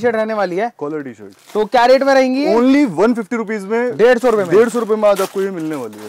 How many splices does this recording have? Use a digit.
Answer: 0